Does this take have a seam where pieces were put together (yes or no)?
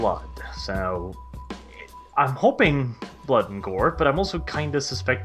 no